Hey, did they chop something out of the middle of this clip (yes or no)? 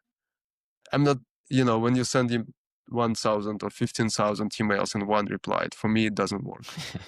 no